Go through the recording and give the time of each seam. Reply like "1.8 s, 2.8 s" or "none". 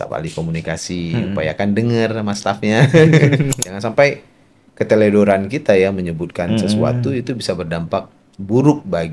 3.5 s